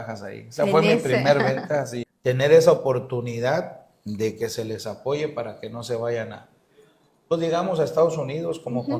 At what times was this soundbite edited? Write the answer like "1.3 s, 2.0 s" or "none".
2.0 s